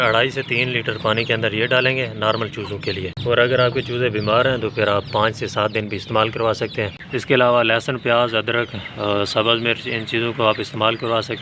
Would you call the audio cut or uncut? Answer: cut